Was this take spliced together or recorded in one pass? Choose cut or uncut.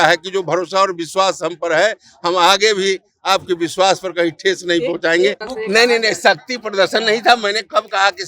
cut